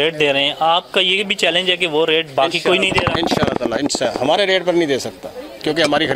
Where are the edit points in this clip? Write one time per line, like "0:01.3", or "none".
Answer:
none

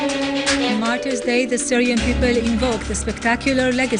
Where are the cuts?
none

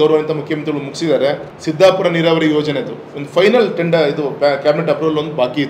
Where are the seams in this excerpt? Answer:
0:01.5

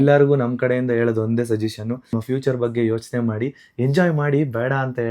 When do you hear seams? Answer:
0:02.1

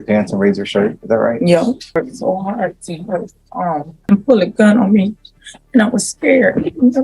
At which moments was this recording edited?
0:02.0
0:03.9

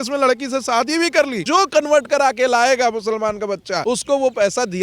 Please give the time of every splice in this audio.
0:01.4
0:03.8

